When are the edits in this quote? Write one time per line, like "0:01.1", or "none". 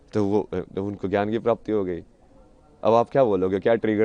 none